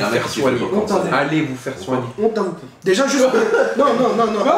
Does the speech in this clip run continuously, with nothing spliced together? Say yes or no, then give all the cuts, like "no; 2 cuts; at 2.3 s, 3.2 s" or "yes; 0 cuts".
yes; 0 cuts